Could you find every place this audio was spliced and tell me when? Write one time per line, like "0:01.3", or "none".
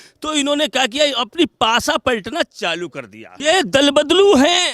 0:03.3